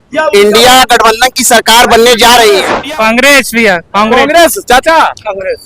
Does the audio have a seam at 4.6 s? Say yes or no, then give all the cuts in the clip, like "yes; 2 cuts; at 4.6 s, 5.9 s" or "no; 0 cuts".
no; 1 cut; at 2.8 s